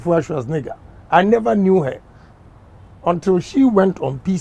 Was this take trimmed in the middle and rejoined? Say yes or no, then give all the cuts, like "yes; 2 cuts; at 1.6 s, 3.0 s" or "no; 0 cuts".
no; 0 cuts